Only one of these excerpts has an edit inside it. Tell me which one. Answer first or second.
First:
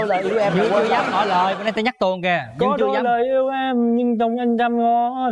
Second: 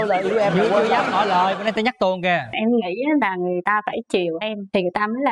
second